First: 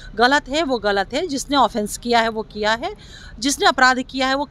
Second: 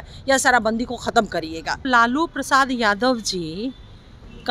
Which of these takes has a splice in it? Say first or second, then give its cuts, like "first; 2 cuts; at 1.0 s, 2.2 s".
second; 1 cut; at 1.8 s